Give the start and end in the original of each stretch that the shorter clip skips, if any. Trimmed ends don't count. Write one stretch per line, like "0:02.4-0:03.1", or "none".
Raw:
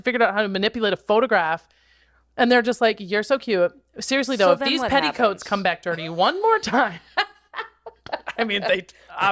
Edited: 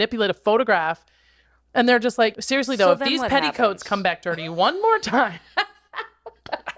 0:03.0-0:04.0